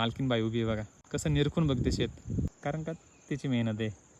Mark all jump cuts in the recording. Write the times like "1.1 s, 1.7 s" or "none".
0.9 s, 2.5 s